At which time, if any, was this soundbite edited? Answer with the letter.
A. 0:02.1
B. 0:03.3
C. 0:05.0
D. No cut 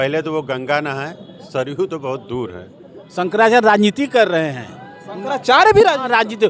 B